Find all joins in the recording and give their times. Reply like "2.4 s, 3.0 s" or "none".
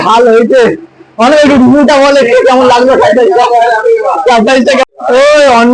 4.9 s